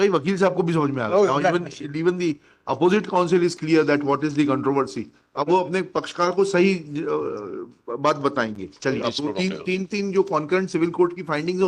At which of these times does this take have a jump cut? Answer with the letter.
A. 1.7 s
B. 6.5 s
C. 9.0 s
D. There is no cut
C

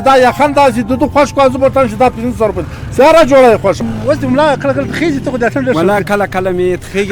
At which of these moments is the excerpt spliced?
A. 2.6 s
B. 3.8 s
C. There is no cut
B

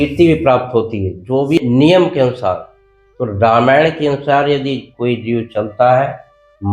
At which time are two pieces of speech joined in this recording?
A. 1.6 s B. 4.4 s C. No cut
A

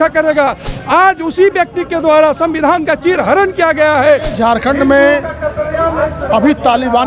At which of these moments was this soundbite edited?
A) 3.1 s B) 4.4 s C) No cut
B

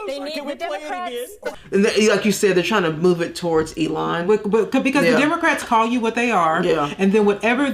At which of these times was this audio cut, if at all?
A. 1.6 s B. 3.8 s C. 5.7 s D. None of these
A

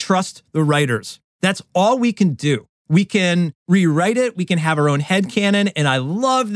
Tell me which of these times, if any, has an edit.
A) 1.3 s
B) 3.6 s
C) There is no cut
B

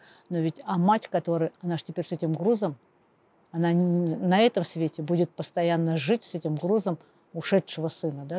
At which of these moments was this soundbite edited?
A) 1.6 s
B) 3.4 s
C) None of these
C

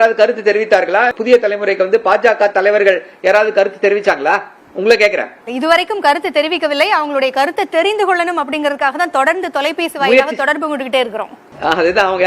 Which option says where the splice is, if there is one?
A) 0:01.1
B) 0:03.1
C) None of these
A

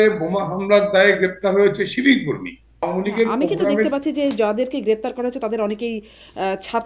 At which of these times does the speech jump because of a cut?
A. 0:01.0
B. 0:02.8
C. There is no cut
B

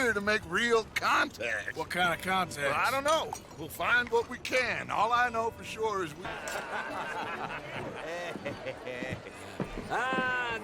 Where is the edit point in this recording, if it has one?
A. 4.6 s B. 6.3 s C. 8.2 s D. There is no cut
B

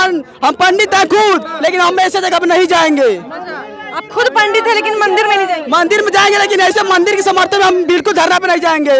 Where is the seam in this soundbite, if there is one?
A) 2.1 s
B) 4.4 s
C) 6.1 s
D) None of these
D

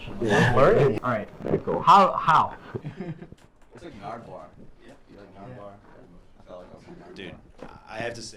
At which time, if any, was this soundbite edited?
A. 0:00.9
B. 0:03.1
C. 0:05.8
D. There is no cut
A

